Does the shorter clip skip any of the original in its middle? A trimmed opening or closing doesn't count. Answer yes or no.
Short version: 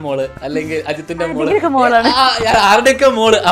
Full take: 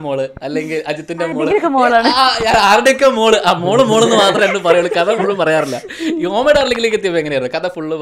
no